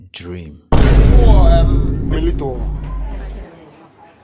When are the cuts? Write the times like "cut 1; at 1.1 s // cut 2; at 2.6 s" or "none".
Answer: cut 1; at 1.8 s